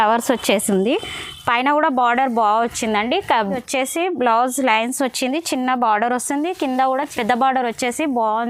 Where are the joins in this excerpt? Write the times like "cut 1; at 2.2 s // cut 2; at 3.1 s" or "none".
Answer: cut 1; at 3.6 s // cut 2; at 7.1 s